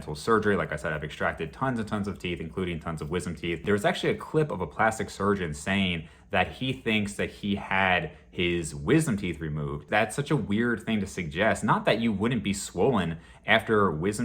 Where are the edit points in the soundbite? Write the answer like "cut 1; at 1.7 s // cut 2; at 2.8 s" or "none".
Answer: cut 1; at 3.6 s // cut 2; at 9.9 s

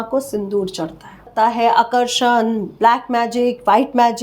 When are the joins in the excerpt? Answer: cut 1; at 1.2 s

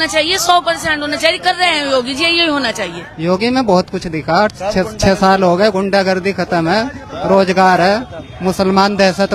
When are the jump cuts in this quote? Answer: cut 1; at 3.1 s

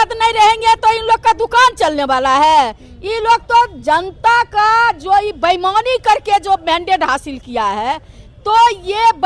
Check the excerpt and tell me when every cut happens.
none

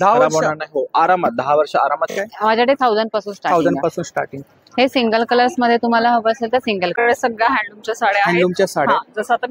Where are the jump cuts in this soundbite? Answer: cut 1; at 2.1 s // cut 2; at 7.0 s

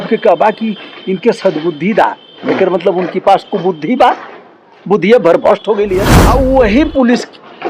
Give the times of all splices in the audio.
cut 1; at 6.1 s

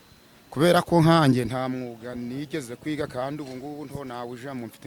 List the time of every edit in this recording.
none

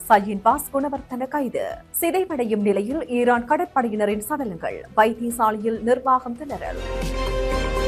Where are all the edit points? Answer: cut 1; at 7.0 s

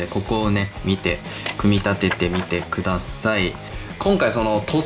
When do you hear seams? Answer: cut 1; at 3.7 s

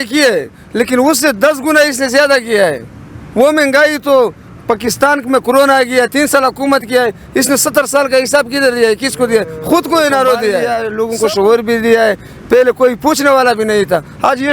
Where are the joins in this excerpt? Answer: cut 1; at 10.7 s

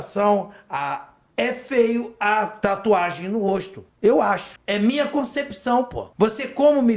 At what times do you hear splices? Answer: cut 1; at 2.5 s // cut 2; at 3.8 s // cut 3; at 4.5 s // cut 4; at 6.0 s

